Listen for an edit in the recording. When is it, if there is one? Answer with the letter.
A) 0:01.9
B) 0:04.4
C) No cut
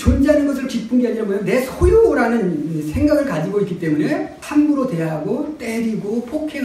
B